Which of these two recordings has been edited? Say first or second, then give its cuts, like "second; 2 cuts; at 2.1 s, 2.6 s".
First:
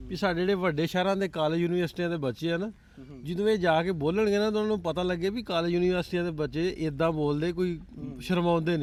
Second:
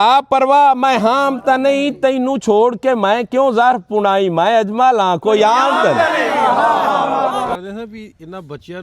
second; 1 cut; at 7.5 s